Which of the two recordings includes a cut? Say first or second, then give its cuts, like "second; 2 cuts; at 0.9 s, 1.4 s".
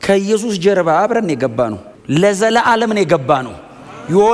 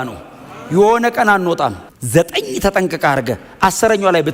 second; 1 cut; at 1.9 s